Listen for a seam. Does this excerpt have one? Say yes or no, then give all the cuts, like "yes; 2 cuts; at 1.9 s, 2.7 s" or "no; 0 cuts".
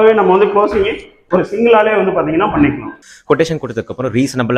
yes; 1 cut; at 3.1 s